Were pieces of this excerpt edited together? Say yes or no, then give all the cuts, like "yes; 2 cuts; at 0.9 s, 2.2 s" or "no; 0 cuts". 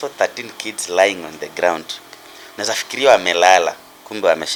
no; 0 cuts